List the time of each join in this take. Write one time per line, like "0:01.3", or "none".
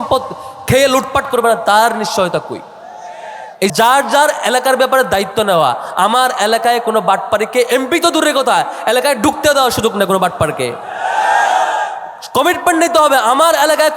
0:03.7